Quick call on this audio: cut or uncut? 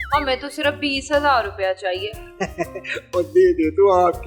uncut